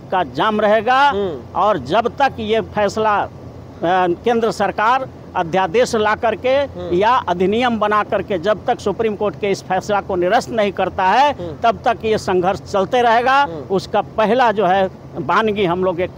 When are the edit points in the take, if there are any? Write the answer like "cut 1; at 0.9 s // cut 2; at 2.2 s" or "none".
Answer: none